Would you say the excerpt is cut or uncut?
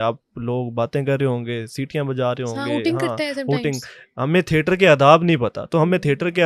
uncut